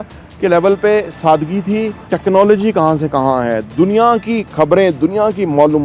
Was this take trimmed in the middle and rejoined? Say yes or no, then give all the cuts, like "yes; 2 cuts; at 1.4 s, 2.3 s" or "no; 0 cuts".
yes; 1 cut; at 2.0 s